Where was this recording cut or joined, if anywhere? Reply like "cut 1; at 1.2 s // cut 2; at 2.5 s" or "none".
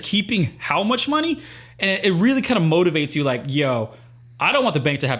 none